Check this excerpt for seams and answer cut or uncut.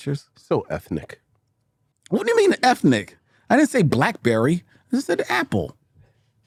uncut